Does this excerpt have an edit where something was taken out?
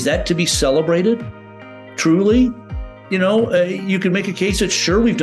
no; 0 cuts

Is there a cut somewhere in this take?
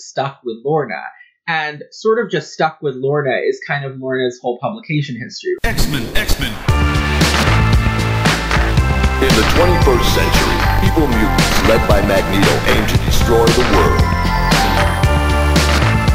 yes; 1 cut; at 5.6 s

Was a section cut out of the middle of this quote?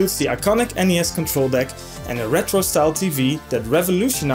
no; 0 cuts

